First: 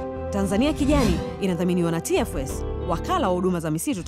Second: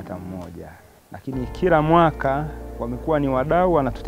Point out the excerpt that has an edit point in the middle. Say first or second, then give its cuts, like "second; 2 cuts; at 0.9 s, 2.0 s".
second; 1 cut; at 1.1 s